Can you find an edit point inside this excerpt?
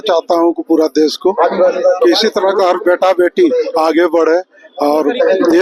no; 0 cuts

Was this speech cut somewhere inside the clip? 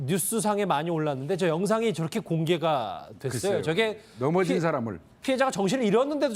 no; 0 cuts

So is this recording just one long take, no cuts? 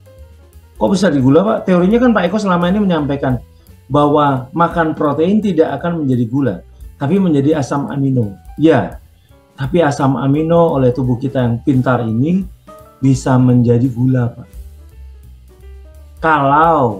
no; 2 cuts; at 14.5 s, 16.1 s

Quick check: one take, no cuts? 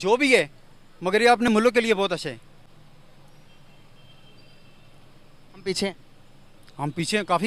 yes; 0 cuts

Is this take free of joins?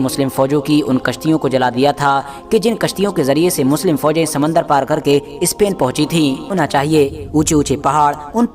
no; 1 cut; at 6.5 s

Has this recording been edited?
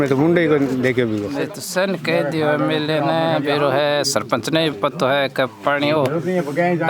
yes; 1 cut; at 1.4 s

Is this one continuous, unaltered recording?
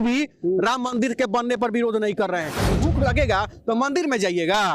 no; 1 cut; at 2.6 s

